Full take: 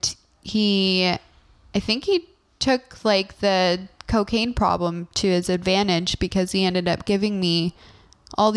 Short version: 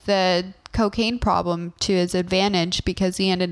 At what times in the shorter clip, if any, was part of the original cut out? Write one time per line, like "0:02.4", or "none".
none

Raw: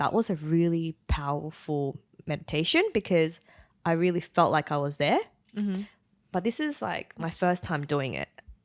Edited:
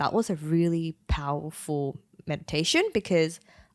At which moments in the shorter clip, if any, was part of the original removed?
none

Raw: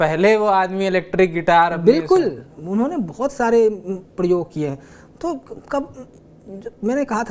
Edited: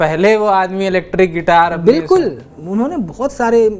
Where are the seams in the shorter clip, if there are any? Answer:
none

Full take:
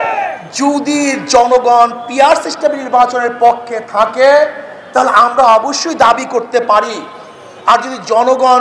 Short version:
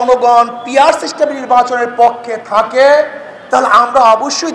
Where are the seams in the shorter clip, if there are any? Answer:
none

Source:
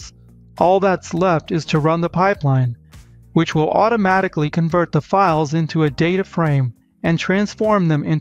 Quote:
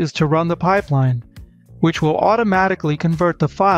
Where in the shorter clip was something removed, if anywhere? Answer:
none

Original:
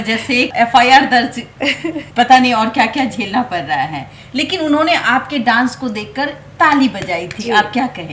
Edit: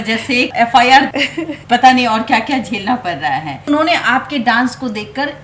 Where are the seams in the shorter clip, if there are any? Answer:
0:01.1
0:03.7

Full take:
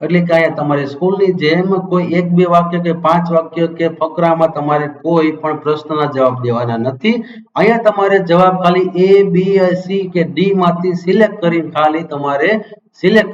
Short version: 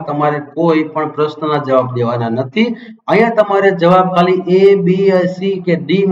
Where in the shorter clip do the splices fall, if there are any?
none

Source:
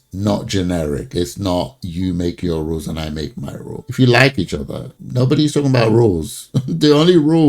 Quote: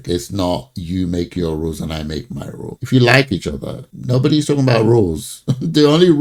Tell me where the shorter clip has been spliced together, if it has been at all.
none

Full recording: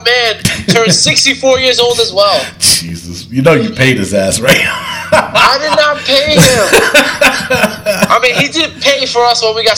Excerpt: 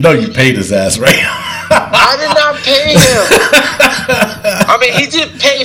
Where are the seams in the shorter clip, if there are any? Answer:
none

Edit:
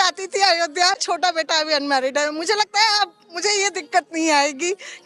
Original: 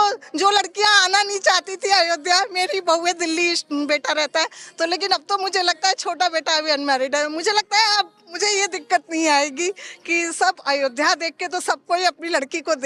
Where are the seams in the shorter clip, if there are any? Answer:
0:01.0

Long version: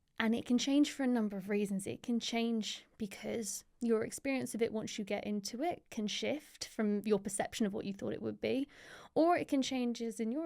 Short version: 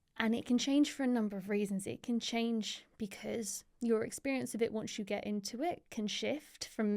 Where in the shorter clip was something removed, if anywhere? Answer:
none

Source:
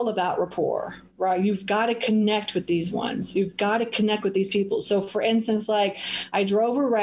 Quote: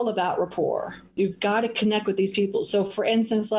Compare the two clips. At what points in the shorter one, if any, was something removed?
0:01.0

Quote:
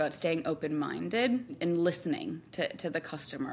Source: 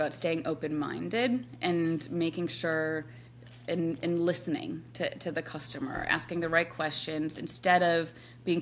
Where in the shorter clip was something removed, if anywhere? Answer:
0:01.6

